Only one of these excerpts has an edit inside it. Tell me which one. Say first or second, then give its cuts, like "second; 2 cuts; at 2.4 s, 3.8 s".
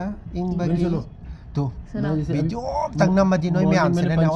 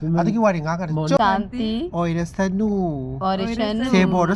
second; 1 cut; at 1.2 s